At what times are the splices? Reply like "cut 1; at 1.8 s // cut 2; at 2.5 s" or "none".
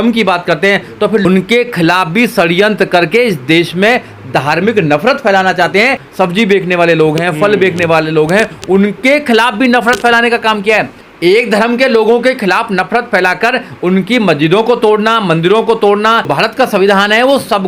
cut 1; at 1.2 s // cut 2; at 6.0 s // cut 3; at 11.0 s // cut 4; at 16.3 s